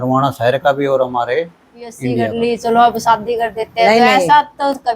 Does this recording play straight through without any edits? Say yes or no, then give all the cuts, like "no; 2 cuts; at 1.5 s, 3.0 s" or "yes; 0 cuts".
no; 1 cut; at 2.2 s